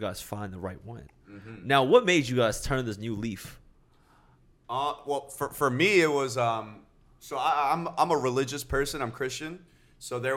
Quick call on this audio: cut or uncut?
uncut